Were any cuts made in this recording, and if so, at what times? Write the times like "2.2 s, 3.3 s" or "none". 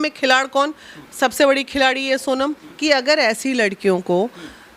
2.7 s